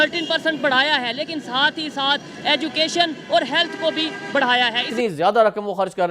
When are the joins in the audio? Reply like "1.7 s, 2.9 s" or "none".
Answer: 4.8 s